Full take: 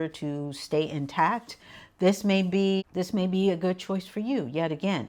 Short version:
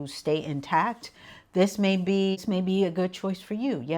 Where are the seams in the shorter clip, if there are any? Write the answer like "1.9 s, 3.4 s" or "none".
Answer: 2.4 s